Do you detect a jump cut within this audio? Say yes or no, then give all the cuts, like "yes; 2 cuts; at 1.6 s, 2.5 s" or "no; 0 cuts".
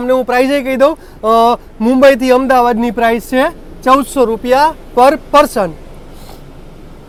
no; 0 cuts